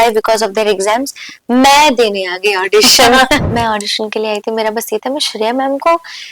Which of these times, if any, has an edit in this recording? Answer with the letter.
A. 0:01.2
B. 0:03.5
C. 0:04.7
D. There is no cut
B